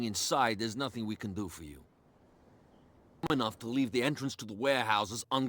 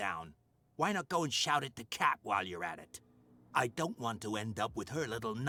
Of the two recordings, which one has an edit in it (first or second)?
first